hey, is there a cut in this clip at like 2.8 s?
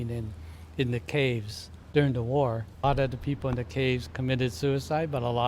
yes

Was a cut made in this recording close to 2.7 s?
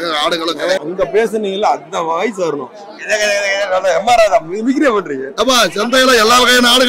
no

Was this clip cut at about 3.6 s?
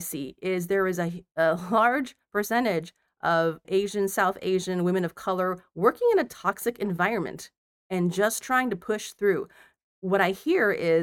yes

